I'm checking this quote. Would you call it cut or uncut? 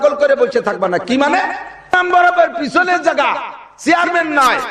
cut